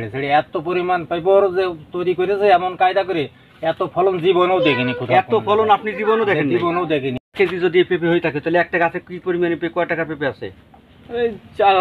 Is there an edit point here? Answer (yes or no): yes